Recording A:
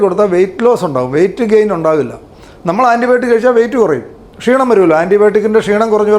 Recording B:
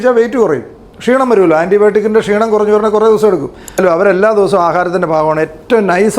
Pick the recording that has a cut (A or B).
B